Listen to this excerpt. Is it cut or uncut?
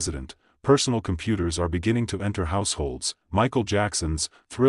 cut